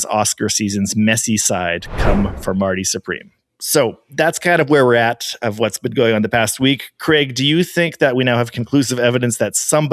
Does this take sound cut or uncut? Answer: uncut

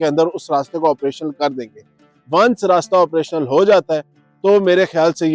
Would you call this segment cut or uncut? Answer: uncut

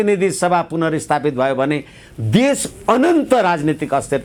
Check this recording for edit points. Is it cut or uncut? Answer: uncut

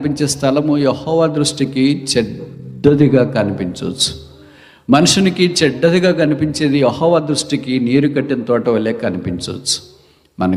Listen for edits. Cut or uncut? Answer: uncut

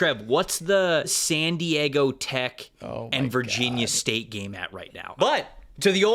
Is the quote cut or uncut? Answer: cut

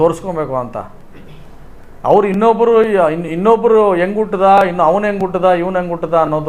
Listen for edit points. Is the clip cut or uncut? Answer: uncut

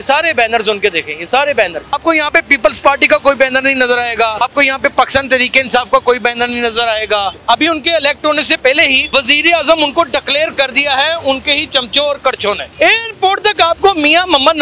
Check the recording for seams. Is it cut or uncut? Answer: cut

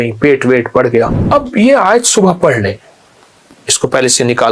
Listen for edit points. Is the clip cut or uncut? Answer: cut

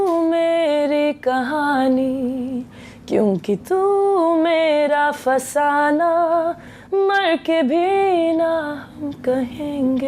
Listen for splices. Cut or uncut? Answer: uncut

